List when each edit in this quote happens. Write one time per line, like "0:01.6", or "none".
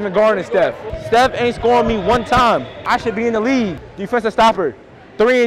0:00.9
0:02.7
0:03.9

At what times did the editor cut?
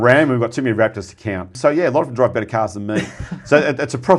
0:01.5

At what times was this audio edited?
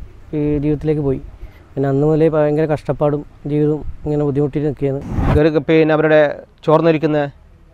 0:05.1

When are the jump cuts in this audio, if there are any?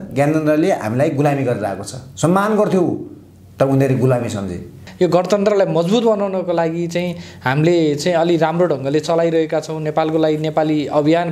0:04.8

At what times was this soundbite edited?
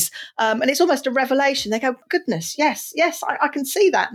0:02.0

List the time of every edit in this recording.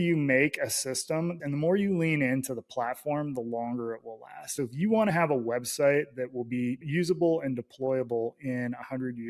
0:01.3
0:04.4

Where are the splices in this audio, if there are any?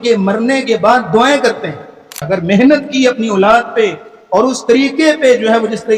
0:02.2

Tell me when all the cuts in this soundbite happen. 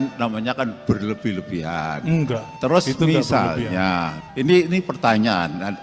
0:02.5
0:04.2

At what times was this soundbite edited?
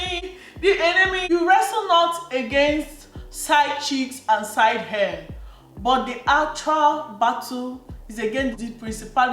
0:01.2

